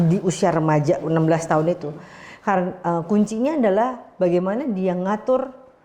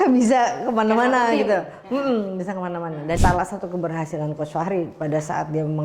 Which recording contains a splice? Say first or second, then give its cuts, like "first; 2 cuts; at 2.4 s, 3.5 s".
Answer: second; 1 cut; at 3.2 s